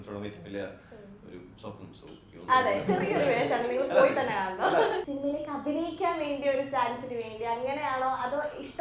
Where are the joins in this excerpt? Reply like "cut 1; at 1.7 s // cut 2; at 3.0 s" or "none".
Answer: cut 1; at 2.4 s // cut 2; at 5.1 s